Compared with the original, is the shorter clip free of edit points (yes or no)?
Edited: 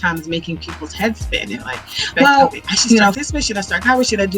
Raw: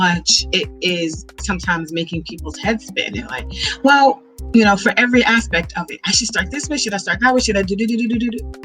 no